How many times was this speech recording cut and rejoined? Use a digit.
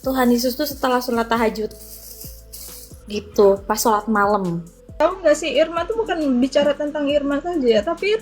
1